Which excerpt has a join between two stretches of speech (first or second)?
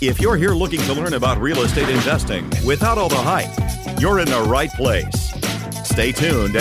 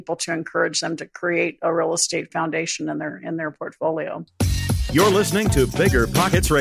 second